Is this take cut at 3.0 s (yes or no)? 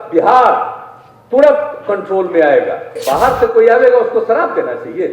yes